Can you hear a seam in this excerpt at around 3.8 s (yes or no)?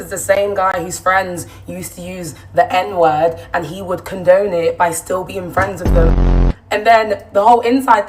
no